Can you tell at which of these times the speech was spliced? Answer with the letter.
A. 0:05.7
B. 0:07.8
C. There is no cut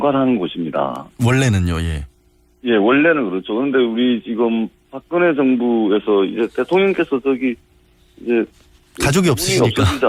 C